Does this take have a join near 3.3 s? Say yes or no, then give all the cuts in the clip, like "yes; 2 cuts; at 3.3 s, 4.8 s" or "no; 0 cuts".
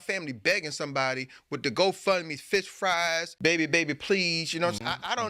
yes; 1 cut; at 3.3 s